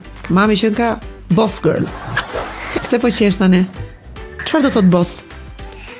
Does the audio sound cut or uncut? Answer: cut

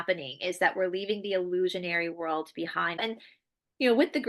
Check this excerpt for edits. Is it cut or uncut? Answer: cut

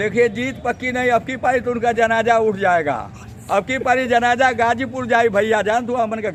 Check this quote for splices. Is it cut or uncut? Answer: uncut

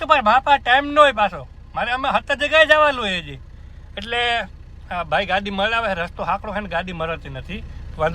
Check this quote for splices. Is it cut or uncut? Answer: uncut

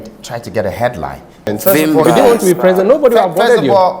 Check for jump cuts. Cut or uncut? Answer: cut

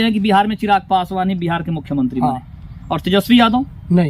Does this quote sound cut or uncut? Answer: uncut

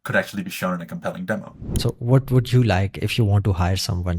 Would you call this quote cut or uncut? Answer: cut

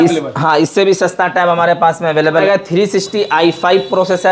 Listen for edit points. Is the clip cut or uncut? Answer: cut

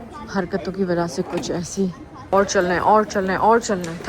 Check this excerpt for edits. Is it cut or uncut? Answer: cut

